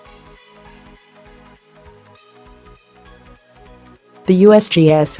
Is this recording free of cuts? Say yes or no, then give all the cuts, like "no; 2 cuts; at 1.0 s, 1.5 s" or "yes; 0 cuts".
no; 1 cut; at 4.3 s